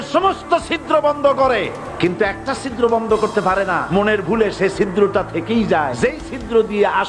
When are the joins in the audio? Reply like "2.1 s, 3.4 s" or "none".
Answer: 1.8 s, 3.8 s, 5.9 s